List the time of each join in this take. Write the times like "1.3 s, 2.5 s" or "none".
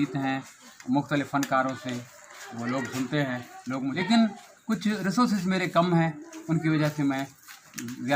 4.0 s